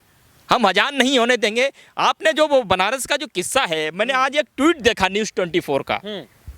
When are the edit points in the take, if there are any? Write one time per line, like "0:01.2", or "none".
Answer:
none